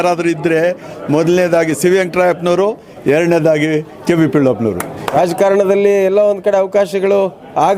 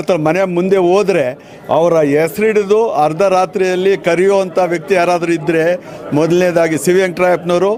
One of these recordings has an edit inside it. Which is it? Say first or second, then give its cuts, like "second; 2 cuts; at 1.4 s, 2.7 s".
first; 1 cut; at 5.1 s